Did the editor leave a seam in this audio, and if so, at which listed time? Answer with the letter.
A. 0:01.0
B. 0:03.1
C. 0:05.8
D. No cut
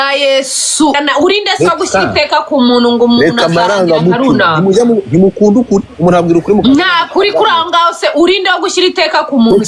A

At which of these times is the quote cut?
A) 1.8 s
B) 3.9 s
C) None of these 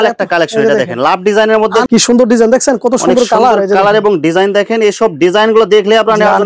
A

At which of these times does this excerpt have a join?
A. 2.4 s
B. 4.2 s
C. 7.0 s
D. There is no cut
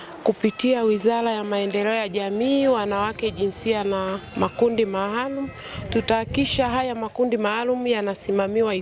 D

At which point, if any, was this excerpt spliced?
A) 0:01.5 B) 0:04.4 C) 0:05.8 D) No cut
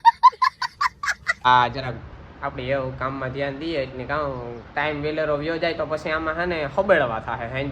A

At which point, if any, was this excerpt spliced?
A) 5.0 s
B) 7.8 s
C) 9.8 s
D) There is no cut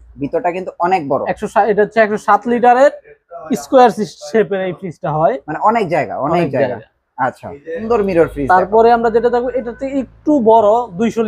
B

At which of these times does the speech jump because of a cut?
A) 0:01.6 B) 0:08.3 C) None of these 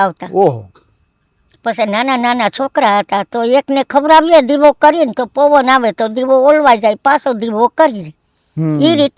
C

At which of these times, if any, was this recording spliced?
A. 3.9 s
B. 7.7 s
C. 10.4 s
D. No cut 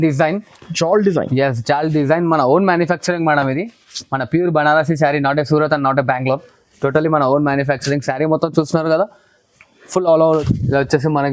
C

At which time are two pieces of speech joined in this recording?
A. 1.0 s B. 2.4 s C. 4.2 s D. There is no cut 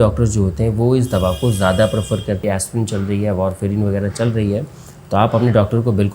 B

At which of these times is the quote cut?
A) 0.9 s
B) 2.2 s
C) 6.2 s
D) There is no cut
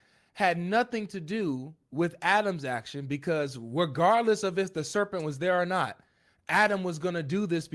D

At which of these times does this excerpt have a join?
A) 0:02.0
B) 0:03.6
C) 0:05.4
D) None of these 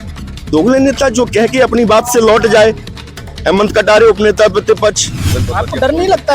C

